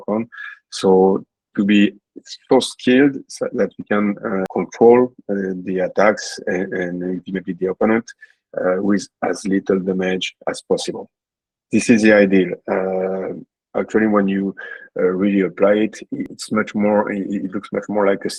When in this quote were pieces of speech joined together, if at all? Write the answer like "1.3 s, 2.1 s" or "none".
none